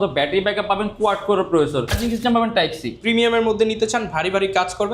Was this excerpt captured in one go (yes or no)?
no